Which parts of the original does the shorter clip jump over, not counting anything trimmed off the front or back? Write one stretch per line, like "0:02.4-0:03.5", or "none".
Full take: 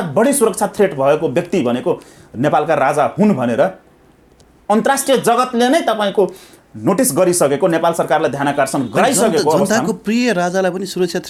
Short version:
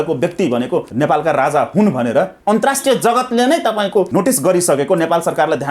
0:02.0-0:02.3
0:03.8-0:04.6
0:06.3-0:06.8